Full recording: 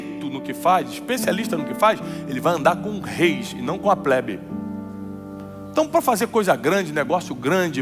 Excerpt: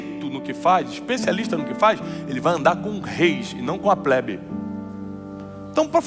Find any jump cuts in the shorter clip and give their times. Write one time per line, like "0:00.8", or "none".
none